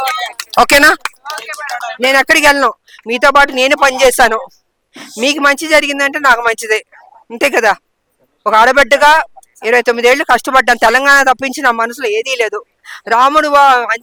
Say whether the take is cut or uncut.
uncut